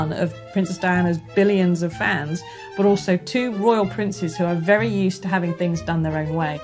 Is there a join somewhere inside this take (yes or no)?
no